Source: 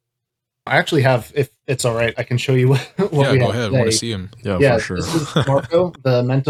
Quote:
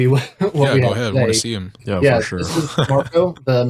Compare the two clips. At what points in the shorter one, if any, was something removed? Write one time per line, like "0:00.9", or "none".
none